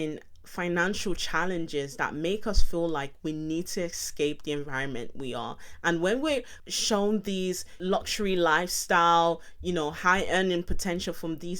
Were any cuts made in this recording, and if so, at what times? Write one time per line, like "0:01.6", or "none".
0:06.6
0:07.8